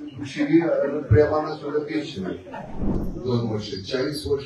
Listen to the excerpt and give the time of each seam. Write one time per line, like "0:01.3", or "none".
0:02.8

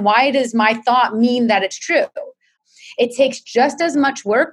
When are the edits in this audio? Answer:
0:02.6

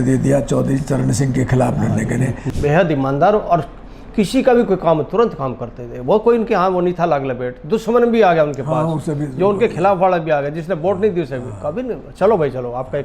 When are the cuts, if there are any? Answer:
0:02.4

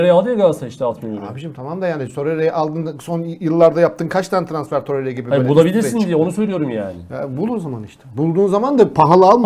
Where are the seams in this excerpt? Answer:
none

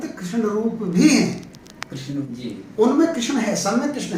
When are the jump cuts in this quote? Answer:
0:02.3

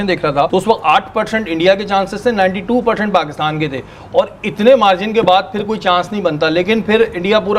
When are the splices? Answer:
none

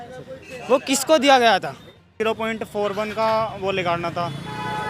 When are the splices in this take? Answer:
0:02.1

